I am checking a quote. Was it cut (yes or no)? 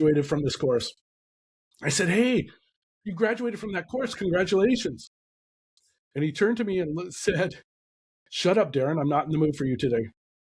no